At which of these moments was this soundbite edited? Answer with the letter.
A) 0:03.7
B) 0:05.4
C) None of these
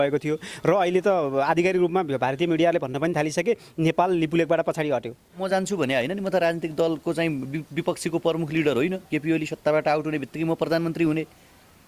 B